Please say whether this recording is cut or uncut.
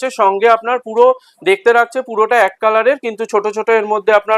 uncut